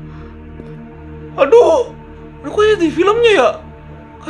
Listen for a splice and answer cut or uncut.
uncut